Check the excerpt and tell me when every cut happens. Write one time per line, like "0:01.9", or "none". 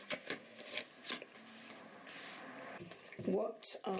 0:02.7